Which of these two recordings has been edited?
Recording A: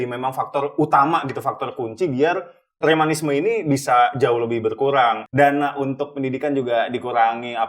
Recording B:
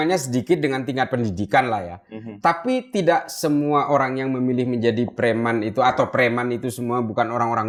A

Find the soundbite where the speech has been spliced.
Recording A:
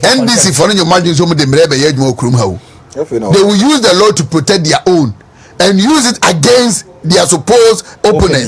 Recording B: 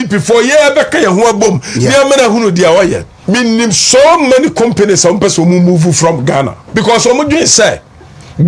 B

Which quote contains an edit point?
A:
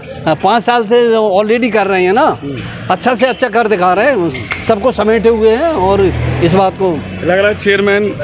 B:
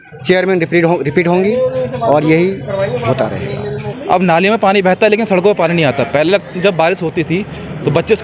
B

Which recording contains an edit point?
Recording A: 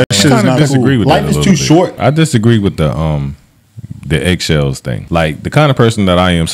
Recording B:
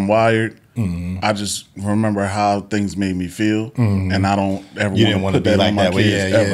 A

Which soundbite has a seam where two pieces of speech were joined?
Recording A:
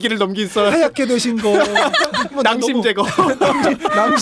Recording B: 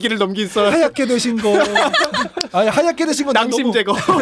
A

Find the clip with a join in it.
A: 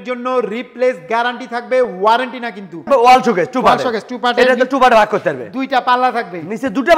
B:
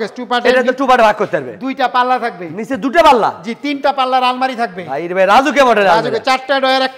A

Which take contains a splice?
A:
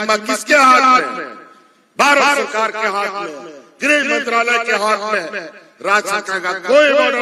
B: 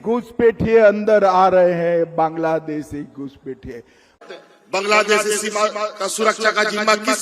B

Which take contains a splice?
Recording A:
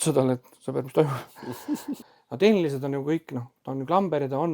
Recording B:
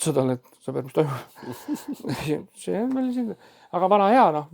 A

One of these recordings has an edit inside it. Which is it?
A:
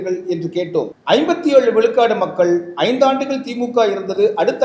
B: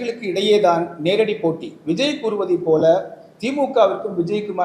A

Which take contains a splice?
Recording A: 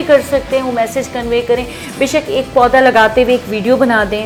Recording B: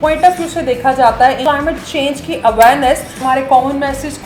B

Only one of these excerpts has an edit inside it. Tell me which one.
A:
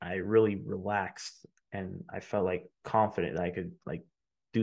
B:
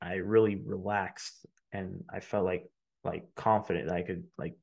A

